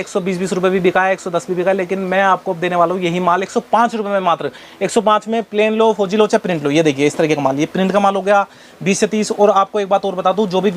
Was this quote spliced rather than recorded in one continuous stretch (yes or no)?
no